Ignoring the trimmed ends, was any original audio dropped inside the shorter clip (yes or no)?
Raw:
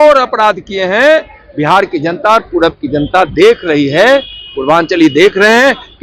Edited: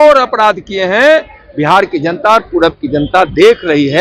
no